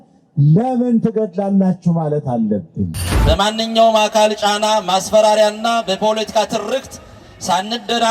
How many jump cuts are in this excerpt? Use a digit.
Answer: 1